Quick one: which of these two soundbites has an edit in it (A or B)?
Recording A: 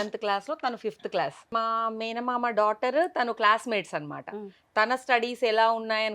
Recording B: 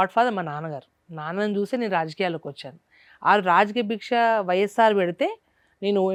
A